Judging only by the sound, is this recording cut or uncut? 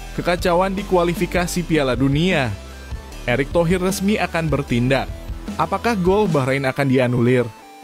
uncut